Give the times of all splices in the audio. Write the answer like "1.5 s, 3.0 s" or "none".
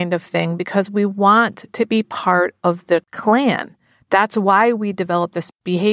3.1 s